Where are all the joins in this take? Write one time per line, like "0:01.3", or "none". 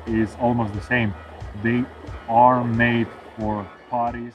none